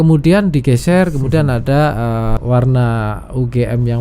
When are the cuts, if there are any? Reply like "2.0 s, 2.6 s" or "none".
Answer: 2.4 s